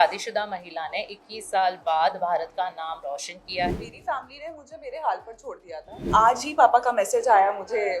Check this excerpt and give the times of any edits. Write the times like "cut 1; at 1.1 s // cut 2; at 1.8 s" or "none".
cut 1; at 3.7 s // cut 2; at 6.1 s